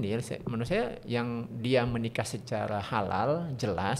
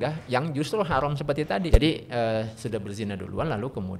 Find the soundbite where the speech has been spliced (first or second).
second